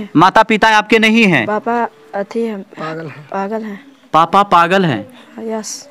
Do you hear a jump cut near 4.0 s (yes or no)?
no